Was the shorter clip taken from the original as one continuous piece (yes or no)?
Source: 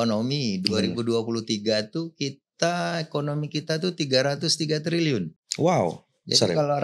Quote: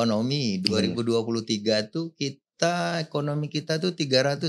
yes